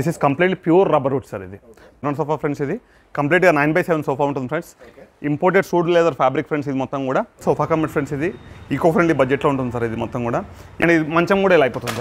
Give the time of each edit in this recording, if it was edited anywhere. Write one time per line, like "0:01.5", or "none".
0:02.0
0:07.4
0:10.8